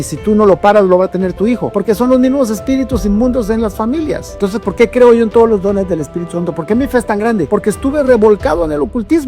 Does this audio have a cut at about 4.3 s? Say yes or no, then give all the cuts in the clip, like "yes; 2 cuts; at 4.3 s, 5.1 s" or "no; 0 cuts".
yes; 3 cuts; at 1.7 s, 4.3 s, 7.5 s